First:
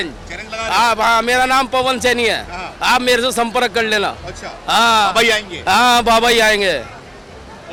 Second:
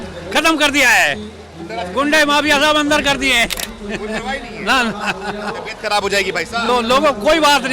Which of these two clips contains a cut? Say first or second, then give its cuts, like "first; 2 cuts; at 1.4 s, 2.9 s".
second; 1 cut; at 3.6 s